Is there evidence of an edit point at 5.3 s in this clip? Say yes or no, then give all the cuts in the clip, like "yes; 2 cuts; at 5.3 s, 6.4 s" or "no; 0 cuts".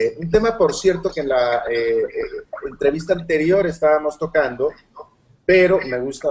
no; 1 cut; at 1.5 s